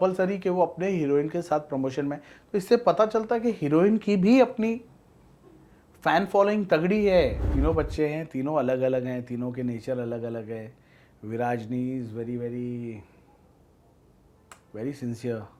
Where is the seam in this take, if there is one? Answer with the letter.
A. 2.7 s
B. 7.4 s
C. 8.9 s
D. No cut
B